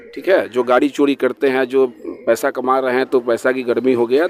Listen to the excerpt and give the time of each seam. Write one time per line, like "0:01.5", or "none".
none